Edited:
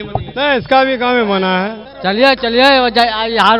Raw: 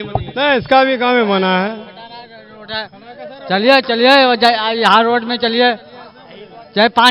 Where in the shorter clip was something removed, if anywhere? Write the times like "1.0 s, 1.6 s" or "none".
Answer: 1.9 s